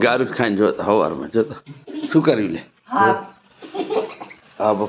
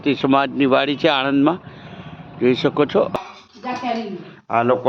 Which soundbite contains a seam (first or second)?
second